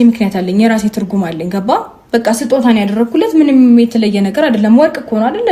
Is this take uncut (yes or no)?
yes